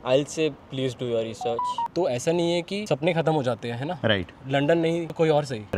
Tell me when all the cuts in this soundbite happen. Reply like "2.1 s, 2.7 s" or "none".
1.9 s